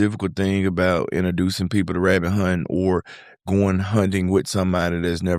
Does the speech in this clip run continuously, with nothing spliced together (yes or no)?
yes